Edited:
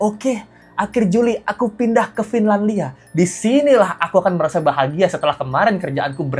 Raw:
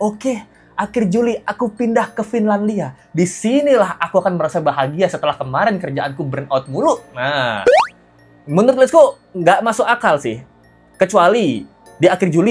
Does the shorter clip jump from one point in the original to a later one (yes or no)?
no